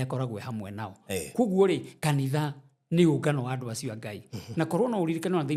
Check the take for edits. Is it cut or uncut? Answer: uncut